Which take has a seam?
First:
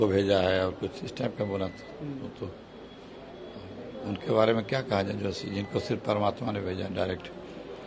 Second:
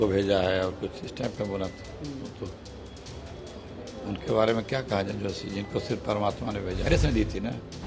second; 1 cut; at 6.9 s

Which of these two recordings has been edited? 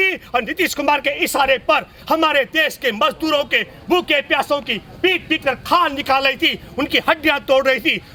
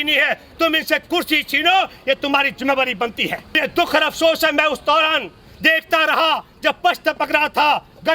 second; 1 cut; at 3.6 s

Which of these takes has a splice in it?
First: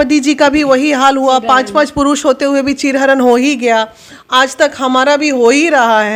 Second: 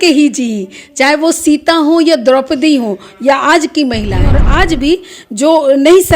second; 1 cut; at 4.4 s

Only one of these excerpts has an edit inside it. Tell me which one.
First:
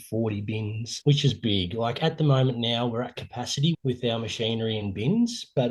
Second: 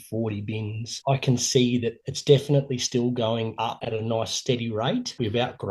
second; 1 cut; at 1.0 s

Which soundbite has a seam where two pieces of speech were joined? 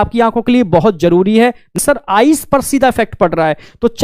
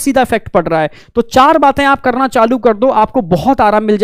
first; 1 cut; at 1.7 s

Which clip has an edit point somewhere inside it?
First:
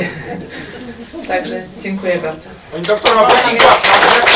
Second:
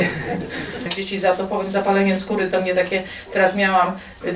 second; 1 cut; at 0.9 s

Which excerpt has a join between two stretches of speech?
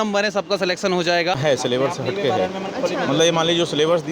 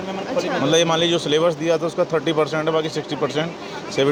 first; 1 cut; at 1.4 s

